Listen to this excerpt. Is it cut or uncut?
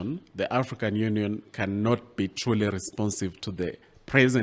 uncut